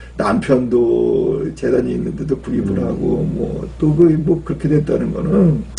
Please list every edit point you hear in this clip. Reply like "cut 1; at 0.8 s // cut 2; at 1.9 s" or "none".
none

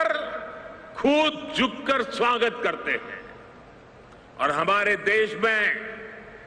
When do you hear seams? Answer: none

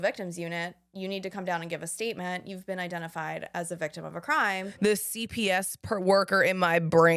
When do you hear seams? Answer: cut 1; at 4.8 s

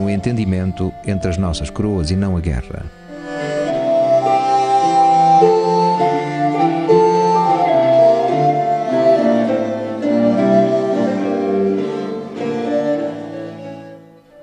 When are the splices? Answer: cut 1; at 13.5 s

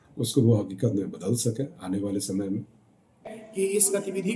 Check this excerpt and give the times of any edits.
cut 1; at 3.3 s

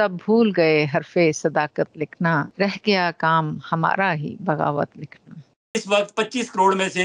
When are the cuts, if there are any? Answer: cut 1; at 2.5 s // cut 2; at 5.7 s

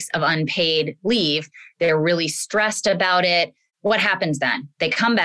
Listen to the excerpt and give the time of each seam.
cut 1; at 3.7 s

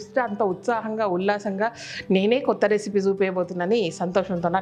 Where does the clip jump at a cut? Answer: none

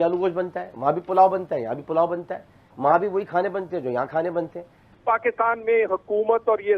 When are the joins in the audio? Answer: cut 1; at 4.8 s

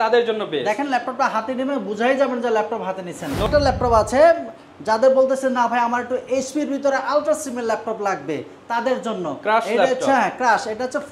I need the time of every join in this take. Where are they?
cut 1; at 3.5 s

